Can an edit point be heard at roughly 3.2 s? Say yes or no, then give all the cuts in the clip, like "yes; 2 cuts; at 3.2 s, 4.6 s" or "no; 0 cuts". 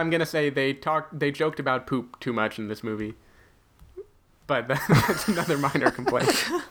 no; 0 cuts